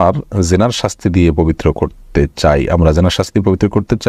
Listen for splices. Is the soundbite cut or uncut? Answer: uncut